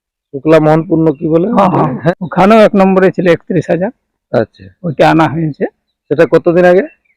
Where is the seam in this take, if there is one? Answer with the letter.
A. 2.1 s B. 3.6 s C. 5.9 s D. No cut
A